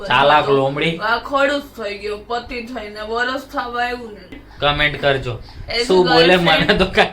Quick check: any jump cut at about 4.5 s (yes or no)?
yes